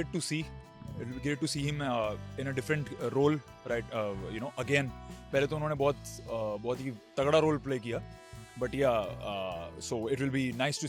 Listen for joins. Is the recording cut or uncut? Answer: uncut